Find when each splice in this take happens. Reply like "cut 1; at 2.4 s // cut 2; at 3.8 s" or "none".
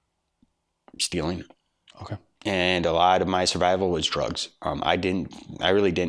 none